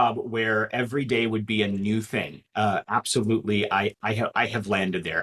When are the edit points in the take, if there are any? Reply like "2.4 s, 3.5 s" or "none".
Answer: none